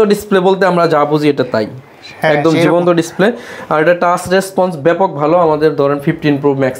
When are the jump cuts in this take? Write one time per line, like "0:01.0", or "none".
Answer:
none